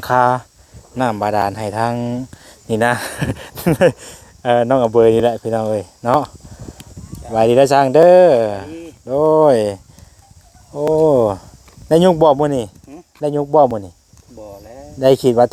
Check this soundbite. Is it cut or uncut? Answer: uncut